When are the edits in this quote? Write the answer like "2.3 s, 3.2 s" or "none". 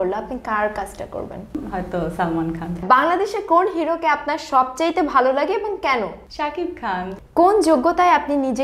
1.6 s, 2.8 s, 7.1 s